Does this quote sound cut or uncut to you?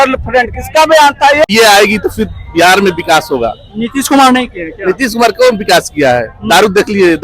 cut